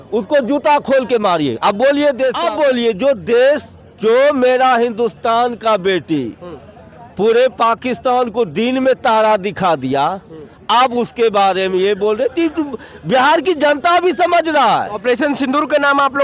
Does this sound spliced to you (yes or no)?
yes